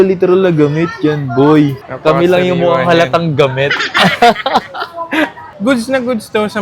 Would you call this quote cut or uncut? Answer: cut